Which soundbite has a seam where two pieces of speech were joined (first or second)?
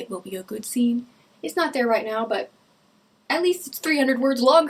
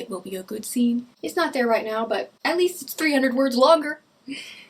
second